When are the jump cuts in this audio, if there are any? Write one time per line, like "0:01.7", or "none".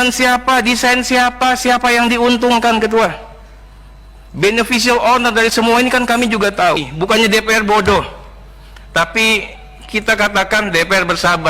0:06.9